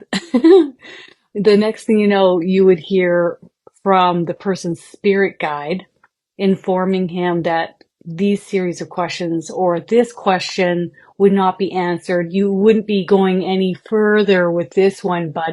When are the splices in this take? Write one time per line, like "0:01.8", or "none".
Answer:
none